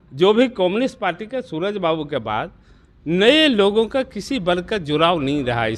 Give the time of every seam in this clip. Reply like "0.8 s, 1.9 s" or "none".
none